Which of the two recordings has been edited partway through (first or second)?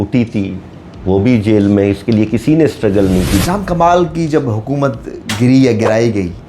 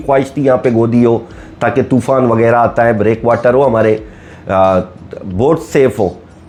first